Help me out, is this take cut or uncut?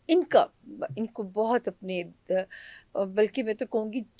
uncut